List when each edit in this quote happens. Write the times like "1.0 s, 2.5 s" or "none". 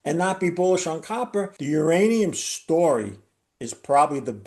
1.6 s

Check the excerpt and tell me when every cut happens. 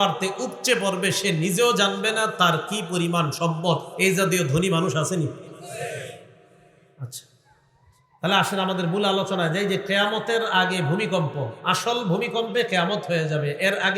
none

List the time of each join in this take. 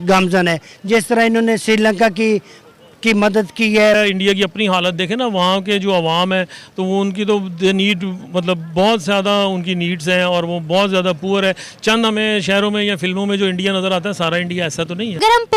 3.9 s

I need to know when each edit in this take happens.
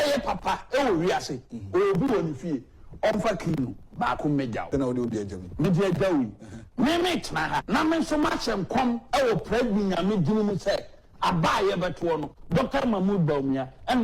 4.7 s, 7.6 s

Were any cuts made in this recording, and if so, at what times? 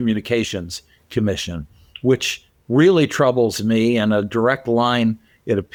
none

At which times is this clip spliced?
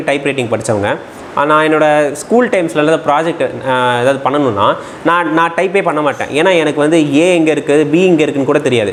none

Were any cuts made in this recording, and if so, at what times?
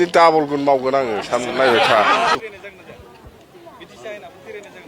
2.3 s

